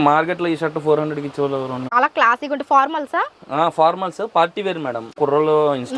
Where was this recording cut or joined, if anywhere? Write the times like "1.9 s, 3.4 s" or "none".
1.9 s, 5.2 s